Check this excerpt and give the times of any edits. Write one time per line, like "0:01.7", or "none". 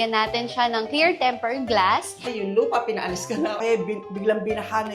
0:02.3
0:03.6